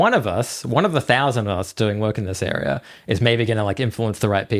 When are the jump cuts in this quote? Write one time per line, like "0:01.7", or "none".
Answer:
none